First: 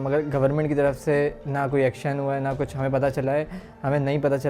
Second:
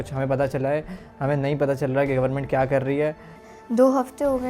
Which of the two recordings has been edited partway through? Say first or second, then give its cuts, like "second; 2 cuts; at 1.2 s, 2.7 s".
second; 1 cut; at 3.3 s